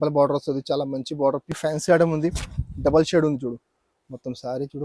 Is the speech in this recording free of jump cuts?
no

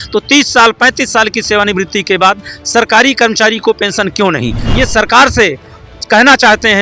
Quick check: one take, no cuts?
no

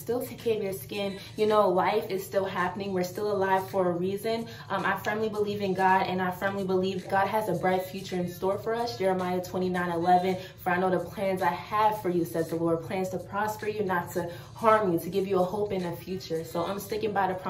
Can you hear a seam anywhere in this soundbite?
yes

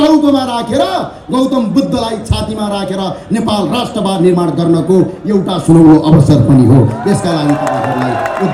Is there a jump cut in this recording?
no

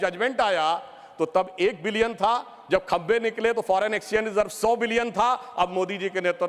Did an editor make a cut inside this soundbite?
no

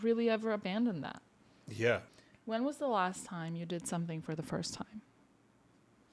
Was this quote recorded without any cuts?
no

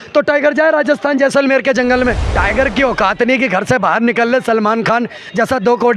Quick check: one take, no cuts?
no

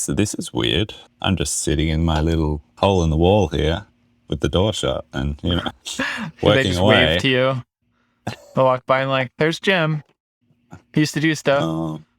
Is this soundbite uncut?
yes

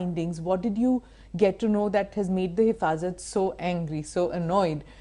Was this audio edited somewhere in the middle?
no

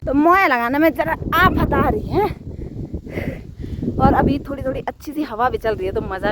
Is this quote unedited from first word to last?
yes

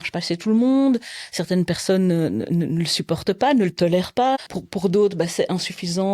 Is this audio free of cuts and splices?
no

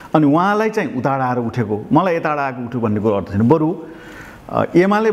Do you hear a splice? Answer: no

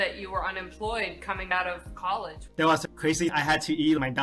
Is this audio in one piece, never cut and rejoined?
no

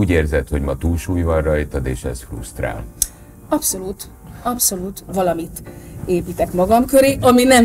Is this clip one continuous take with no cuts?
no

